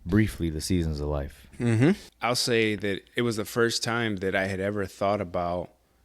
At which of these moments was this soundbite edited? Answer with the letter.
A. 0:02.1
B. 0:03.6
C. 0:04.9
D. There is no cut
A